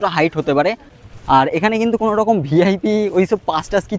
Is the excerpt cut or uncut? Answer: cut